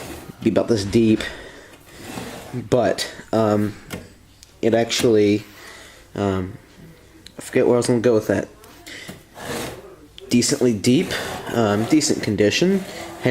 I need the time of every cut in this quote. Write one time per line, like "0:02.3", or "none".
0:02.2